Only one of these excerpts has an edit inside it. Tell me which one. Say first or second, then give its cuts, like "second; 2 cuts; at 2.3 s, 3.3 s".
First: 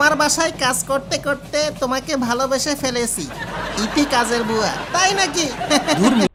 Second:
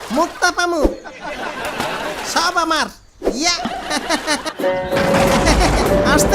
second; 1 cut; at 4.4 s